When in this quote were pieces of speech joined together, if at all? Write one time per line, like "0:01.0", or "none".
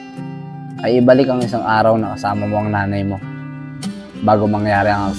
none